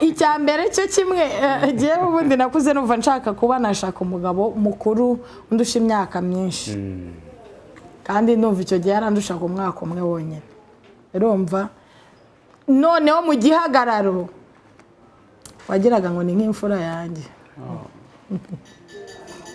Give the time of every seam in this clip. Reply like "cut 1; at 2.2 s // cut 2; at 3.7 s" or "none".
none